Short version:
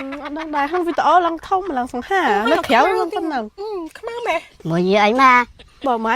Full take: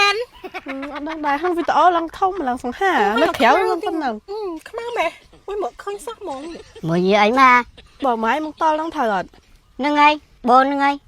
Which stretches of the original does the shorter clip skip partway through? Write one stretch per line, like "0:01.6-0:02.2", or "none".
0:05.2-0:06.7